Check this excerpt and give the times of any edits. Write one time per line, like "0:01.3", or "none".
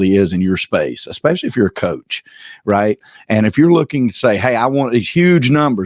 none